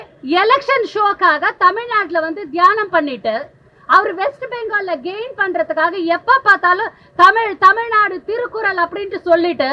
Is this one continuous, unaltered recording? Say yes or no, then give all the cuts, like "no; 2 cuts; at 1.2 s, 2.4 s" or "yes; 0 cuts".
yes; 0 cuts